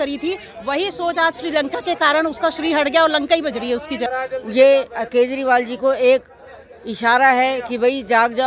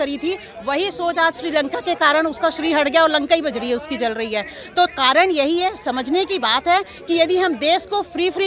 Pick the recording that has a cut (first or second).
first